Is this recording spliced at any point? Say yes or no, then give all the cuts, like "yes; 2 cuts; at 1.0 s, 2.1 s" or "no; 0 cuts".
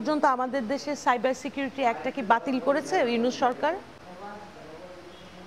no; 0 cuts